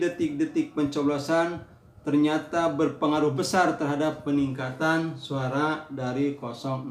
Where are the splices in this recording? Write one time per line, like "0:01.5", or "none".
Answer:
none